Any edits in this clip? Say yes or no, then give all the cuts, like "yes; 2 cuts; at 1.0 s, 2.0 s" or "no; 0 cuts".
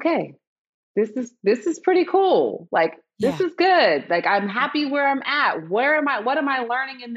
no; 0 cuts